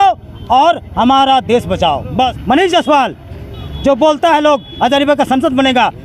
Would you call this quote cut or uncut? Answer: cut